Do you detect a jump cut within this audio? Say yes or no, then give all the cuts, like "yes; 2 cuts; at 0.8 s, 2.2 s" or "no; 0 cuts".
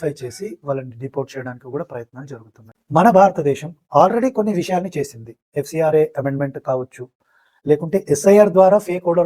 yes; 1 cut; at 2.7 s